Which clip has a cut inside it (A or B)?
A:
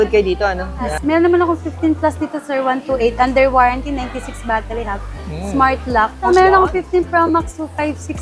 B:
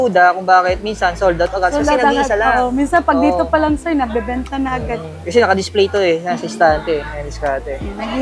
A